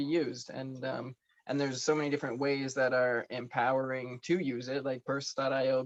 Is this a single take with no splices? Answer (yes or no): yes